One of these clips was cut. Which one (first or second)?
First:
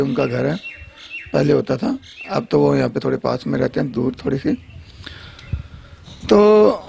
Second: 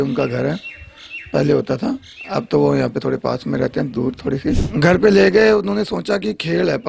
second